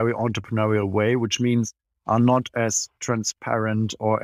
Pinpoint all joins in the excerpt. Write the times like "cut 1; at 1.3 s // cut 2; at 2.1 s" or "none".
none